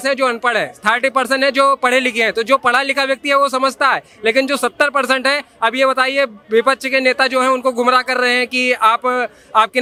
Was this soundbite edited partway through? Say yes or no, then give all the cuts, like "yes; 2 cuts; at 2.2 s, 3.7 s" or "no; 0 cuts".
no; 0 cuts